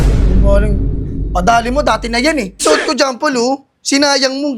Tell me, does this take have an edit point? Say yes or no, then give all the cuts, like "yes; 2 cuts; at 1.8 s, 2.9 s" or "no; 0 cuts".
yes; 1 cut; at 2.6 s